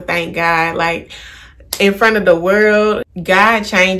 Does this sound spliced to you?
yes; 1 cut; at 3.1 s

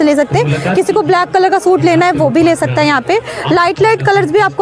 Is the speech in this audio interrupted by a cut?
no; 0 cuts

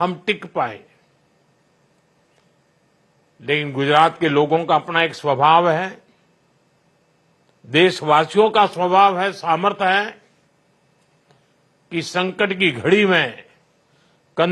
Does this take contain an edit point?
no; 0 cuts

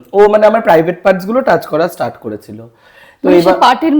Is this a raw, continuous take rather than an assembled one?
yes; 0 cuts

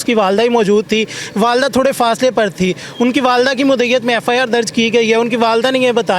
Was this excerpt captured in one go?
yes; 0 cuts

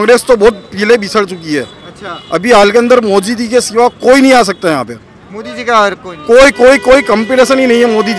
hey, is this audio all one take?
yes; 0 cuts

